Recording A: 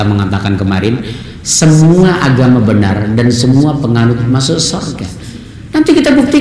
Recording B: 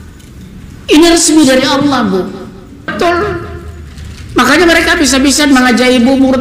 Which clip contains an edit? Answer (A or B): B